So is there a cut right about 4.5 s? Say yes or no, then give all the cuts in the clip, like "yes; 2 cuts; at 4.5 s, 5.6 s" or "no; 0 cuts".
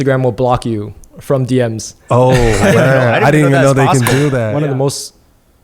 yes; 1 cut; at 4.5 s